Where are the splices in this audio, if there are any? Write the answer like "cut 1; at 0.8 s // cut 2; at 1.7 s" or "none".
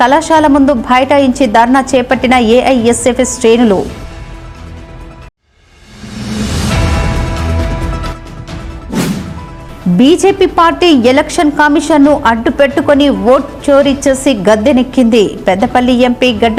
none